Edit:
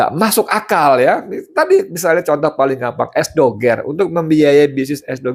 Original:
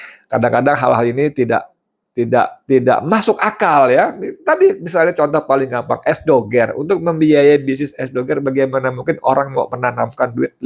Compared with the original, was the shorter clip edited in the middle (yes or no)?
no